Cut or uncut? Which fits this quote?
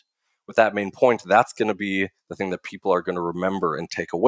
uncut